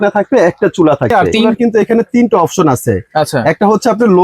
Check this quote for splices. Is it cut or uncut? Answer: cut